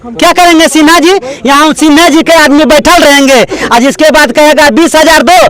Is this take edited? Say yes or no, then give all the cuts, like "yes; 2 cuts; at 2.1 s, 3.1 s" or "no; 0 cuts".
no; 0 cuts